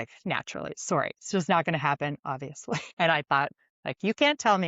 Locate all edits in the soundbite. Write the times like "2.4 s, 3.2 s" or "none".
2.9 s